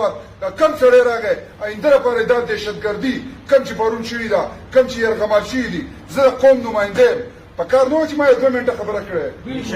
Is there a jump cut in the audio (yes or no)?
no